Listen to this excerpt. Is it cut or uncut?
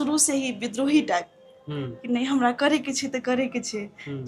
uncut